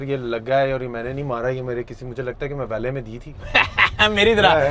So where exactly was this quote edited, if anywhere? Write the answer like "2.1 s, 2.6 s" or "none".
3.3 s